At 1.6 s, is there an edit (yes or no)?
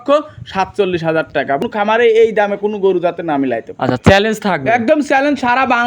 yes